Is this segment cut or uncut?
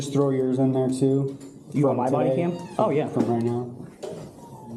uncut